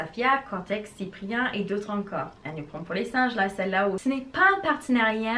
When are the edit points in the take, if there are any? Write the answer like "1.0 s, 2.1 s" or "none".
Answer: 2.3 s, 4.0 s